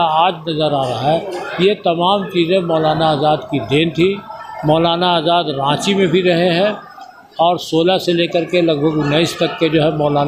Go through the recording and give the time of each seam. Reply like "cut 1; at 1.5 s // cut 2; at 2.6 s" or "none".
none